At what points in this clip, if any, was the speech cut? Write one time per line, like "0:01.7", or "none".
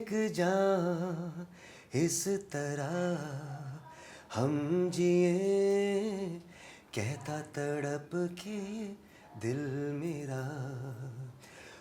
none